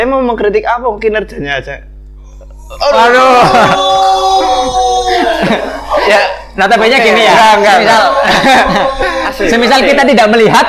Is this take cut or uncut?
uncut